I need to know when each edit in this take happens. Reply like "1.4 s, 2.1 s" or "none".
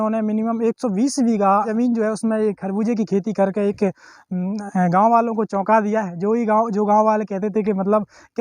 1.7 s

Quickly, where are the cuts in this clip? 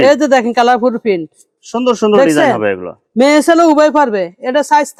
none

